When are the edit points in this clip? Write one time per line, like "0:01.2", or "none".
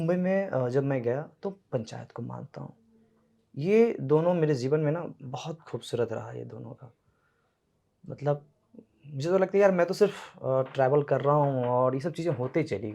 none